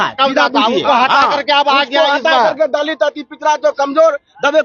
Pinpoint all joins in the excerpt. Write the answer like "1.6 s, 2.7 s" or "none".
none